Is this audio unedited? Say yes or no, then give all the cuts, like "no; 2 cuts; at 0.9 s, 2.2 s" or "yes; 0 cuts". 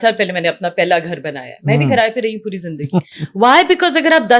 yes; 0 cuts